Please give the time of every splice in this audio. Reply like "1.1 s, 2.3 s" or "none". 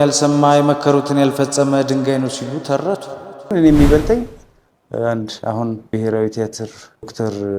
3.5 s